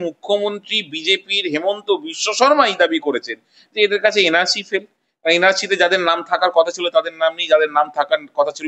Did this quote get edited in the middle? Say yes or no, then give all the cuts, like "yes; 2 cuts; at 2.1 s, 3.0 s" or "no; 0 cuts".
no; 0 cuts